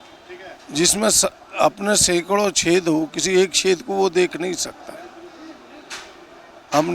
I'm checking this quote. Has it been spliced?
no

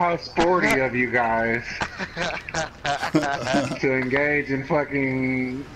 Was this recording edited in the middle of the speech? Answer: no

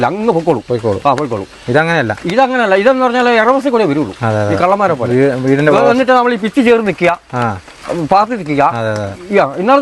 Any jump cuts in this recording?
no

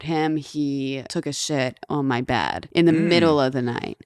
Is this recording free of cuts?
no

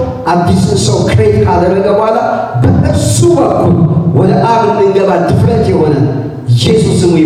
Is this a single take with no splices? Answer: yes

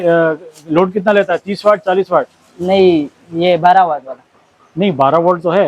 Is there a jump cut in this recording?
no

